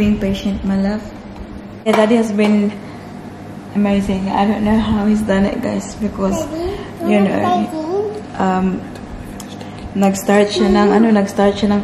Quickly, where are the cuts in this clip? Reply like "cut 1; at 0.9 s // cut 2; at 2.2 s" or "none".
cut 1; at 1.7 s

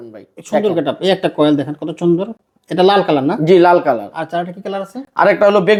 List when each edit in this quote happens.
none

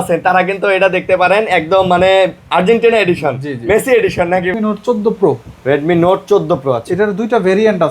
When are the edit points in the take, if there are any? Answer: cut 1; at 4.5 s

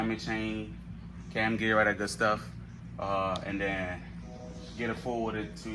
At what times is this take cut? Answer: none

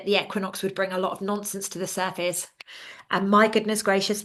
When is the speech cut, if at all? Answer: none

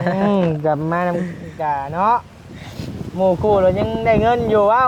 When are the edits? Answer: none

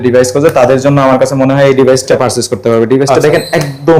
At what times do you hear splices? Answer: cut 1; at 2.1 s

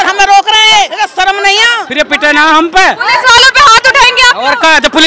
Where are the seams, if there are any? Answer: cut 1; at 0.9 s // cut 2; at 1.8 s

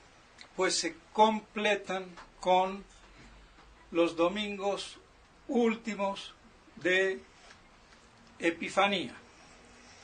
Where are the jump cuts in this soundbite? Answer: cut 1; at 6.3 s

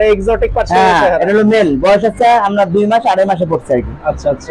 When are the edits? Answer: none

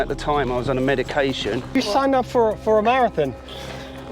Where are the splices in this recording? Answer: cut 1; at 1.7 s

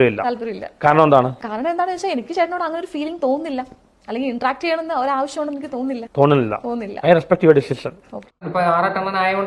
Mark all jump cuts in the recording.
cut 1; at 8.4 s

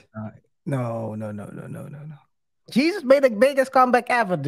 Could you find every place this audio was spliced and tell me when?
cut 1; at 2.7 s

